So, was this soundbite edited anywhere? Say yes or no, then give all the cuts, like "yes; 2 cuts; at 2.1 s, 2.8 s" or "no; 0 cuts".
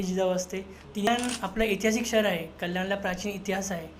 yes; 1 cut; at 1.1 s